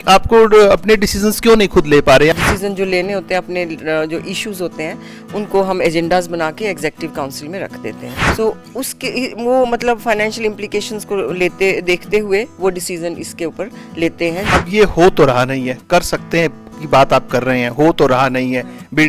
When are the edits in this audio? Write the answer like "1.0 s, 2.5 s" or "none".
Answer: 2.3 s, 8.1 s, 14.5 s

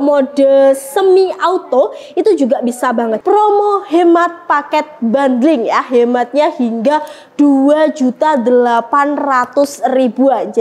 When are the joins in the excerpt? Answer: 3.2 s

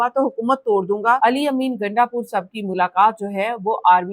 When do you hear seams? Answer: 1.2 s

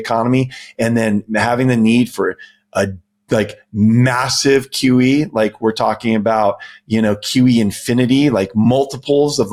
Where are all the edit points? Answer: none

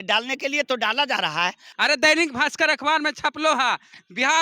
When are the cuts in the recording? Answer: 1.6 s

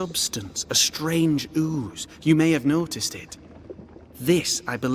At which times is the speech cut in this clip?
none

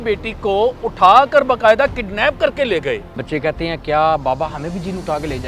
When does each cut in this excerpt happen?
3.2 s

